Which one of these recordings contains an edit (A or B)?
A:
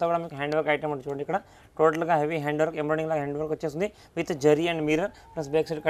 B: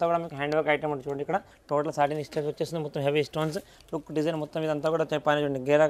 B